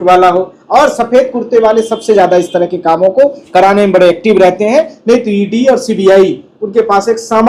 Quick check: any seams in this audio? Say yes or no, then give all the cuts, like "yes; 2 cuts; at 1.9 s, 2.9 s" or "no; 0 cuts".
no; 0 cuts